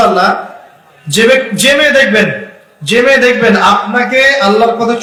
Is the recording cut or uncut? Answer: uncut